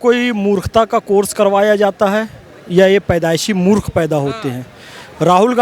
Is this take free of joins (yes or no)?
yes